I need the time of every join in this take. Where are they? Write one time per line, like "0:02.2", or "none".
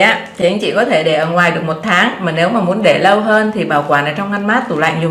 none

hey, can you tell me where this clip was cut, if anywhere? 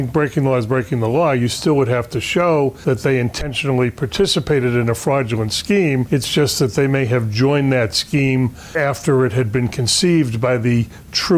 0:02.8
0:06.1
0:08.6

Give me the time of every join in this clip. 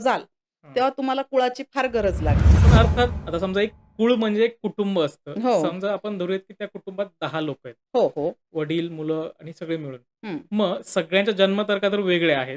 0:02.7

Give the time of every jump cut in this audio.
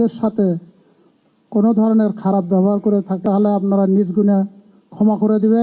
0:03.2

